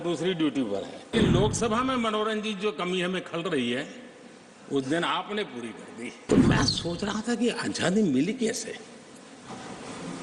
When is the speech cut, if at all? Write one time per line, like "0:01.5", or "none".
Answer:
0:01.1
0:06.2